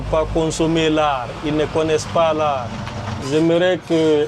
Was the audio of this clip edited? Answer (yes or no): yes